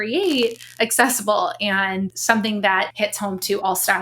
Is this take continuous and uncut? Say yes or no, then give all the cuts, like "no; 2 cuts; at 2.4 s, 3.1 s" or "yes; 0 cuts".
no; 2 cuts; at 2.2 s, 2.9 s